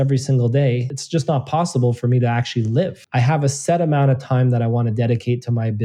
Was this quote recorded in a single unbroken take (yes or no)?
no